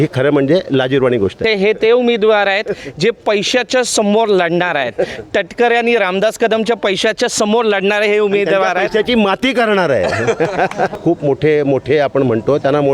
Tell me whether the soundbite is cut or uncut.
cut